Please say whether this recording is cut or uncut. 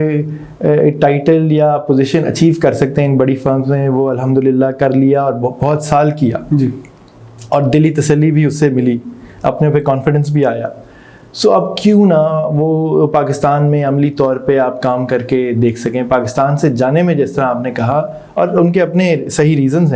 uncut